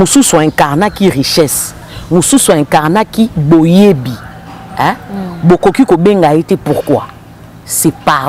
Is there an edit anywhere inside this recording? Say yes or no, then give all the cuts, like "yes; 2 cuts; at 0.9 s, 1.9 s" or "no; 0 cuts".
no; 0 cuts